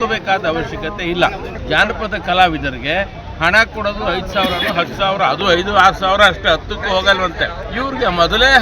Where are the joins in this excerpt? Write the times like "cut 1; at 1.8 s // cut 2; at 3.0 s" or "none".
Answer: cut 1; at 1.6 s // cut 2; at 7.6 s